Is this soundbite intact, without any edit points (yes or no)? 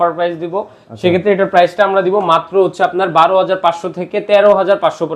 yes